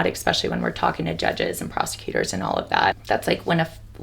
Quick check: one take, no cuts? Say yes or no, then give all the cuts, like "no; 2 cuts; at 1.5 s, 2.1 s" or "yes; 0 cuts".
no; 1 cut; at 3.0 s